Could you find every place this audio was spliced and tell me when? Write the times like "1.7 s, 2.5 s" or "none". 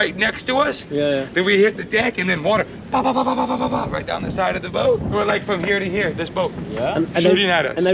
5.1 s